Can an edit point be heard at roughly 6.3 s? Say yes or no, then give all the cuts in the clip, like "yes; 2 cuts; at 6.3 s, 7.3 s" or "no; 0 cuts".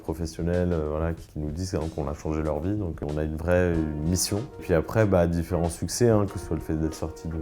no; 3 cuts; at 1.2 s, 3.0 s, 4.6 s